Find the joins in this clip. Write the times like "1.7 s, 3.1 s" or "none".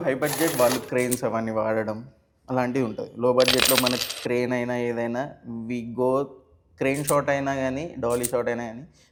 none